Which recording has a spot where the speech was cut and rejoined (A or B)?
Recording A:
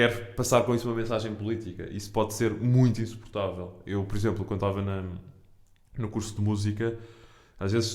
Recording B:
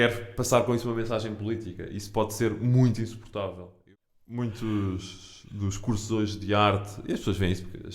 B